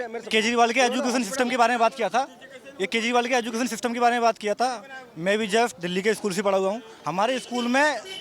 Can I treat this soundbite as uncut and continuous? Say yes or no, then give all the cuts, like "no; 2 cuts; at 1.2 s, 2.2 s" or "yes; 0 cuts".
yes; 0 cuts